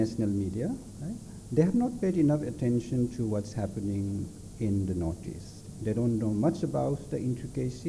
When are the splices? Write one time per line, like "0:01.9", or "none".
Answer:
none